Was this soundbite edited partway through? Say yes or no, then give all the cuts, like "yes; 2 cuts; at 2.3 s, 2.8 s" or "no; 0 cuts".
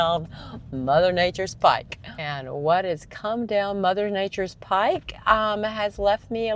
no; 0 cuts